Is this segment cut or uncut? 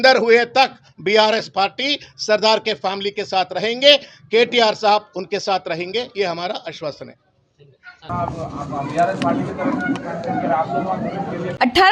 uncut